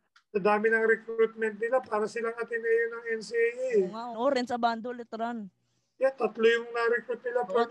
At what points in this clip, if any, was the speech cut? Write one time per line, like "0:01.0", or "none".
0:04.1